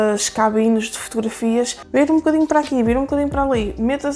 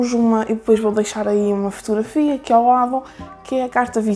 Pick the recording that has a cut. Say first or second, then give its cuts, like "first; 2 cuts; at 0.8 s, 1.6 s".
first; 1 cut; at 1.8 s